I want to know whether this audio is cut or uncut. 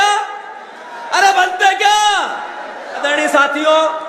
cut